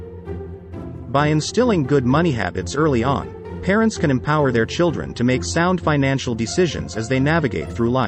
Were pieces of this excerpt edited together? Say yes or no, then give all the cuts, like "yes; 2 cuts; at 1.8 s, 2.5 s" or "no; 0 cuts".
yes; 1 cut; at 1.0 s